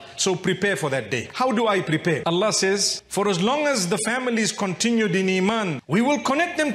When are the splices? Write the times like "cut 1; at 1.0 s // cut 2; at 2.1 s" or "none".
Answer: cut 1; at 2.2 s